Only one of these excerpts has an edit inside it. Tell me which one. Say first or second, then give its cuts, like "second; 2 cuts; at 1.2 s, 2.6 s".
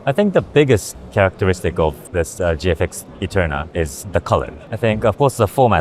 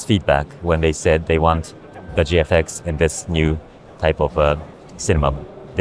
first; 4 cuts; at 0.9 s, 2.0 s, 3.7 s, 4.6 s